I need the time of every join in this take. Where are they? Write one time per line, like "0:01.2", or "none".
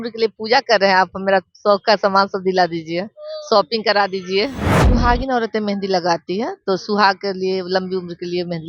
0:04.7